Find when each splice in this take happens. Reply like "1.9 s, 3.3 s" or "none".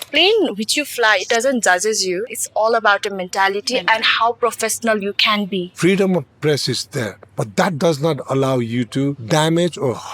2.3 s, 5.7 s, 9.2 s